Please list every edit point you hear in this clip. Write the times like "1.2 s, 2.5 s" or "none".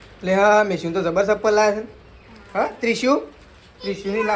none